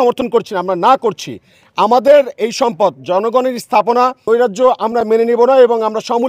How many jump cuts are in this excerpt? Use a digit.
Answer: 1